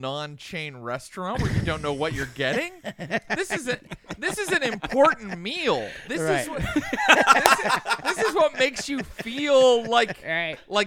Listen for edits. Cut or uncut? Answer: uncut